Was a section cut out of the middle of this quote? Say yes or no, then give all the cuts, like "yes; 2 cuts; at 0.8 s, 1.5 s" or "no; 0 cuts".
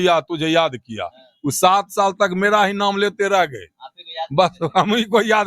no; 0 cuts